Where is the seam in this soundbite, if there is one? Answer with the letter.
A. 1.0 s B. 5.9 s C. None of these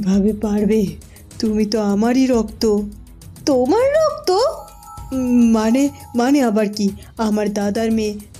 C